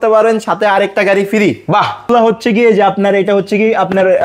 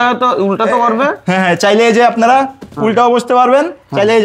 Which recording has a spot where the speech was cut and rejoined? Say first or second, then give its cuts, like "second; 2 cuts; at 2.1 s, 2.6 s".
first; 1 cut; at 2.1 s